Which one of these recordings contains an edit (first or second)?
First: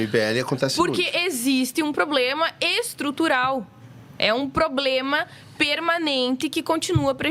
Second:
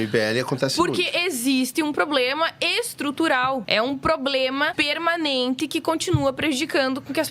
second